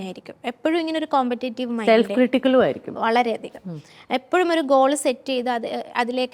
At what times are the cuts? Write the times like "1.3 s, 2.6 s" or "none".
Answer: none

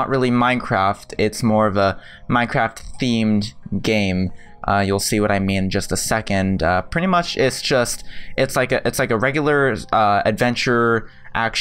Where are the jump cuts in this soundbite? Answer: none

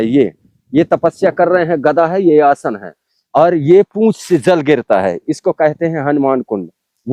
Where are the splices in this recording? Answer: none

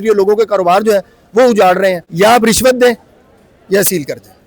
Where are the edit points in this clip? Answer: 2.0 s

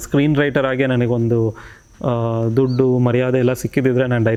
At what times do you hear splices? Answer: none

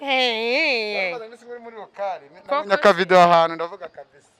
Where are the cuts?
none

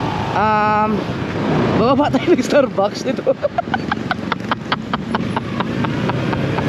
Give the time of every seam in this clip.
none

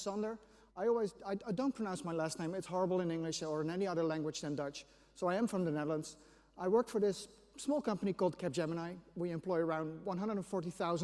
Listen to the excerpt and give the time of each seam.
none

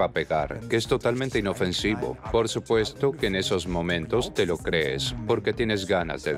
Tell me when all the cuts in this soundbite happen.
2.2 s

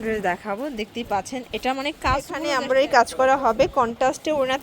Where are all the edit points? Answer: 2.9 s

